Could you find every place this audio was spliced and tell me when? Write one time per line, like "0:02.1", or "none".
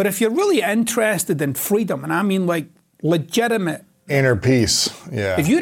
0:04.1